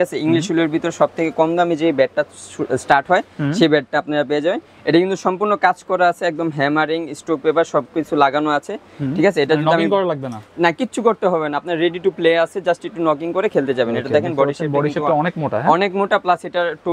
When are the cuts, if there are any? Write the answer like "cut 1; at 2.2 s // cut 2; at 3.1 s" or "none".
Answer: none